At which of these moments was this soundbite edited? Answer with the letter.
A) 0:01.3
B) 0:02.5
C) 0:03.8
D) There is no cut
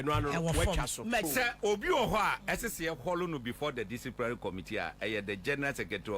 A